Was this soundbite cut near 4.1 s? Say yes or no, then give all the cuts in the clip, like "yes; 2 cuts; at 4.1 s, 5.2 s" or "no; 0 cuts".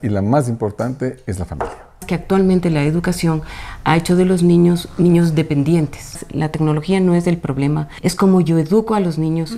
no; 3 cuts; at 2.0 s, 6.3 s, 7.9 s